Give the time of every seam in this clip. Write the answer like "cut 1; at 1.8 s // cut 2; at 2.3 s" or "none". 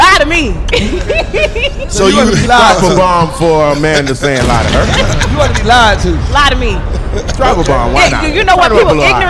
none